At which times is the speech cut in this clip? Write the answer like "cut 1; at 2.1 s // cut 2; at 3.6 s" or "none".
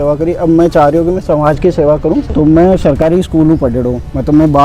cut 1; at 2.3 s